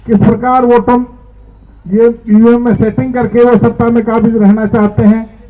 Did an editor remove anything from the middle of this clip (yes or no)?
no